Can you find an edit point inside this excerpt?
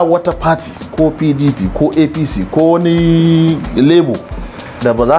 no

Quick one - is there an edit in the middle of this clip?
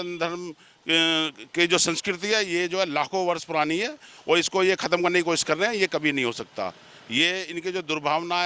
no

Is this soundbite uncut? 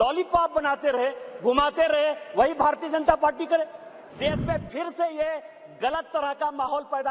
no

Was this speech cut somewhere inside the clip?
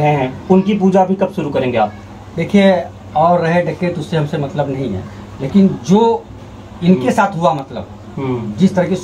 no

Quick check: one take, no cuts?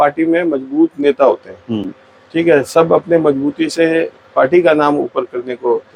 yes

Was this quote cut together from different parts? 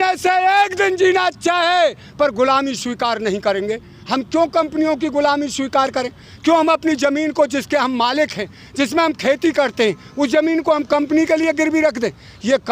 no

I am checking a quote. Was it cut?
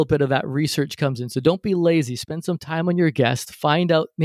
no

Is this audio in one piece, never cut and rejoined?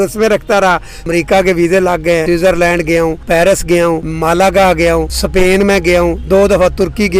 no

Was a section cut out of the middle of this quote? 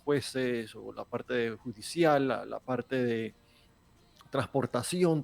no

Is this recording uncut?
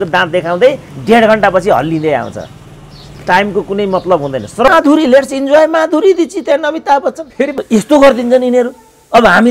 no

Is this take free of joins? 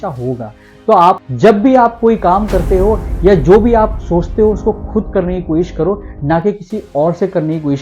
no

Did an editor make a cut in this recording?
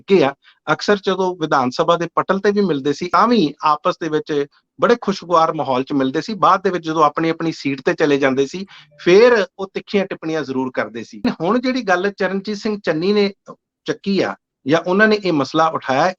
yes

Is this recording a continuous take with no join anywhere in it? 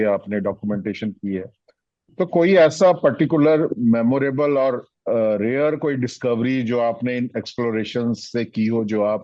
yes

